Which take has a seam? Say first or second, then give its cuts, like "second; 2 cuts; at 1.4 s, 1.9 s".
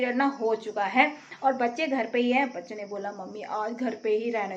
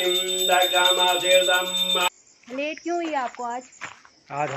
second; 1 cut; at 2.0 s